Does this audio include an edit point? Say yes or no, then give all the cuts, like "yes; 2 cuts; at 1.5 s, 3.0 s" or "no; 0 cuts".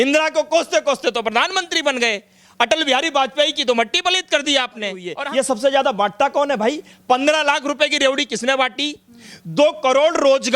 yes; 1 cut; at 5.1 s